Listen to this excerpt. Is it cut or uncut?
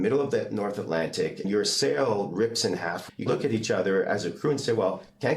cut